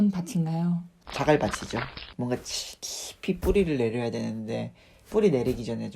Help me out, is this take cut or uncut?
cut